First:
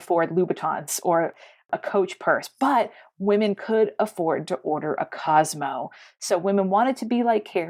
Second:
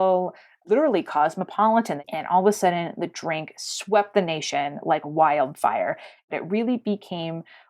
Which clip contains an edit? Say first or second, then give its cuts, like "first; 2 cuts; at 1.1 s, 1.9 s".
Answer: second; 2 cuts; at 2.0 s, 6.3 s